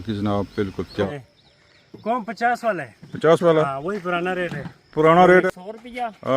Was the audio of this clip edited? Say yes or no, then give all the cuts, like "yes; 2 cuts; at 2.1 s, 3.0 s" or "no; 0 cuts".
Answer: yes; 2 cuts; at 1.1 s, 5.5 s